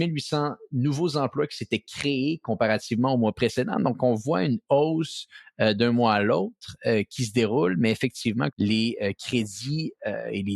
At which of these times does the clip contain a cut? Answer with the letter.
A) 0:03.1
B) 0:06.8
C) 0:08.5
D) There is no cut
C